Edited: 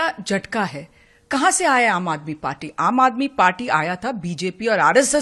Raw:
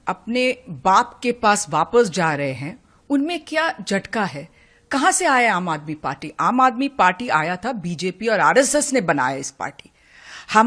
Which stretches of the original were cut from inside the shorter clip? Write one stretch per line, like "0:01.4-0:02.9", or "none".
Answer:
none